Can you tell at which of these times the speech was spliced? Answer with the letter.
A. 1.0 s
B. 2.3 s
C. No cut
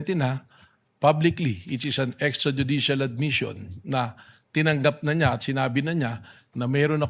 B